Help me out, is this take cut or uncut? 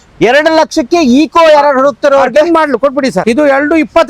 cut